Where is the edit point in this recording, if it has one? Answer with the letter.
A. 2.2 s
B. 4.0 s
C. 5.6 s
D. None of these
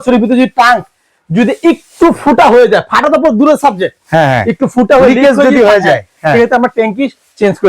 D